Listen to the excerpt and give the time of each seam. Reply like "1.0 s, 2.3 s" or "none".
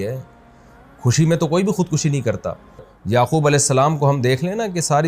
2.9 s